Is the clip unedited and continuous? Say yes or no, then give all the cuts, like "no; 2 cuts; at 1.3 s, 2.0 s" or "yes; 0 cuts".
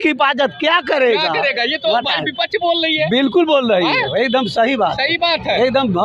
yes; 0 cuts